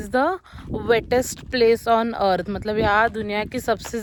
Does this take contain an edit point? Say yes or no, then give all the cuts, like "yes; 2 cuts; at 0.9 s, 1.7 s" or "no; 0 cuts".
no; 0 cuts